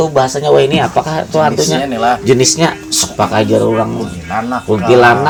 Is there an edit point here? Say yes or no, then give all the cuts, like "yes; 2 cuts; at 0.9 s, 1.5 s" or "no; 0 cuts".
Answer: no; 0 cuts